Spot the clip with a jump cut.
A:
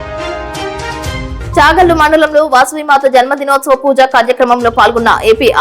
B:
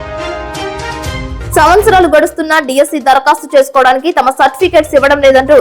B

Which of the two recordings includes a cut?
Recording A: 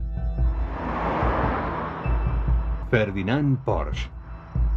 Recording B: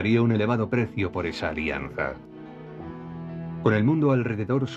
A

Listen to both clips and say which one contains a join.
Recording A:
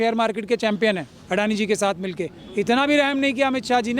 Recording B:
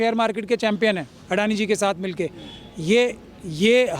A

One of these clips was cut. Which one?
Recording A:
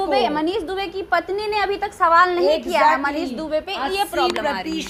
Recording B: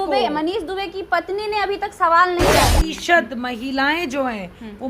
B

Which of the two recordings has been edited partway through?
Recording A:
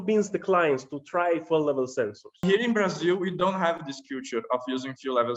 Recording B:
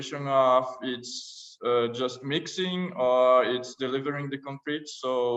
A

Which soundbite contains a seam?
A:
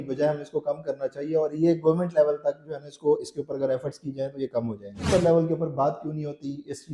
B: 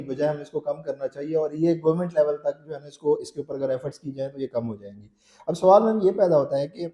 A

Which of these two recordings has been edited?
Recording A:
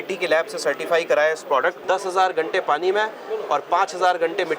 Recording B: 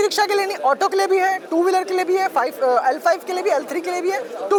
A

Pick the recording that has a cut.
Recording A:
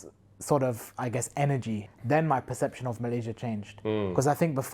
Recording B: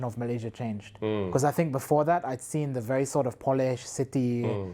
A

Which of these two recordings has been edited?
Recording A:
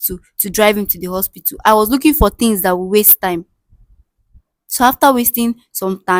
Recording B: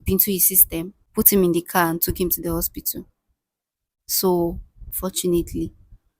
B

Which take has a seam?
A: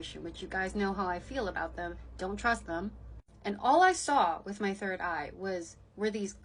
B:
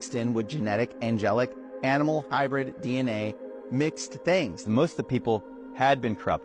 B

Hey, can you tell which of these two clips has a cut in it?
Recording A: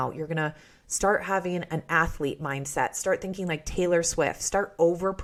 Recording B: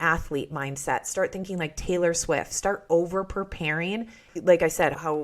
B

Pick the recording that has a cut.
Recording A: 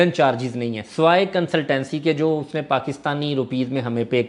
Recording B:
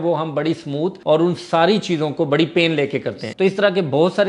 B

